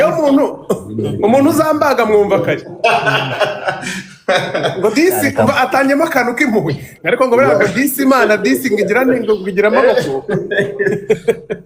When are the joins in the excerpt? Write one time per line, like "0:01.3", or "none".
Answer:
none